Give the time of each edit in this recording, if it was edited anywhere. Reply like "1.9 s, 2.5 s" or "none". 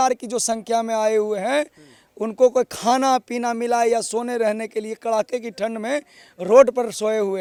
none